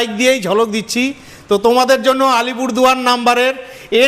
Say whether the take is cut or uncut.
uncut